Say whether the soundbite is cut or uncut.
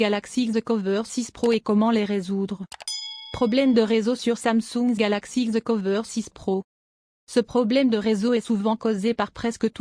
uncut